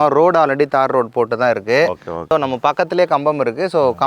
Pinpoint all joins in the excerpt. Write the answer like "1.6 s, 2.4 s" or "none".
2.3 s